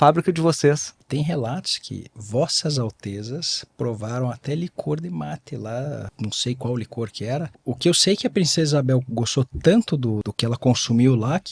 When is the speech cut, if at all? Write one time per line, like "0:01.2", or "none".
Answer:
0:01.0
0:06.1
0:07.6
0:10.2